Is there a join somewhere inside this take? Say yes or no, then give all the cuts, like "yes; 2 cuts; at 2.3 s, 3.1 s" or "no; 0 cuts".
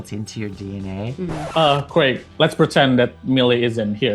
yes; 1 cut; at 1.4 s